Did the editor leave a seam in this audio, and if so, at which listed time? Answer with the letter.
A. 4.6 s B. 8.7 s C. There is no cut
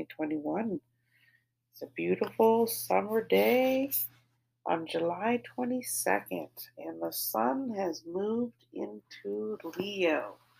C